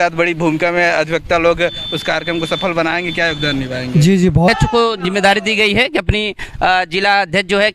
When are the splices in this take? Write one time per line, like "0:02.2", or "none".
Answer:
0:04.5